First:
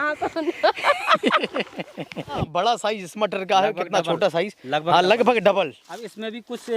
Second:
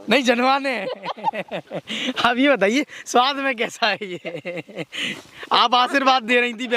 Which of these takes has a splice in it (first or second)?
first